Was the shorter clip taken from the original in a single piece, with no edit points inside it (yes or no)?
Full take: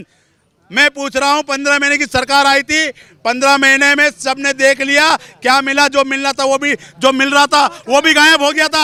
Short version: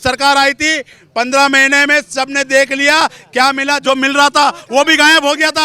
no